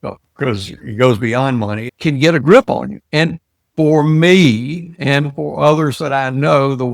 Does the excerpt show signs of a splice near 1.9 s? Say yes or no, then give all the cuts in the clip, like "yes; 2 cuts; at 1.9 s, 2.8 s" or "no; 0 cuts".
yes; 1 cut; at 1.9 s